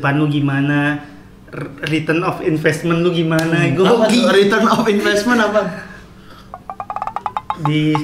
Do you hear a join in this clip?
no; 0 cuts

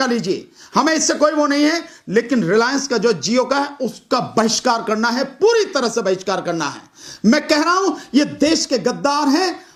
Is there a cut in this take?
no; 0 cuts

